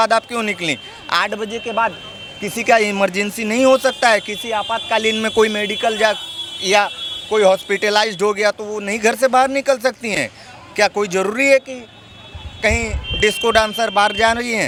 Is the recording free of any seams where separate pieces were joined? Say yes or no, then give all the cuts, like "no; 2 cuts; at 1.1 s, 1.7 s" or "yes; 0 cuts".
yes; 0 cuts